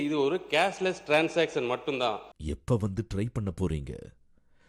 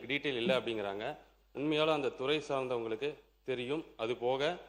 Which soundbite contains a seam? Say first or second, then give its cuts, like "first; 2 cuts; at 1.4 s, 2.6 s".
first; 1 cut; at 2.3 s